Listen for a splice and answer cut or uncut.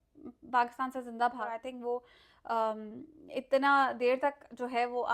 cut